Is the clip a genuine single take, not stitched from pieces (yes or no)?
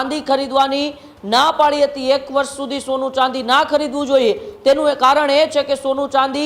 yes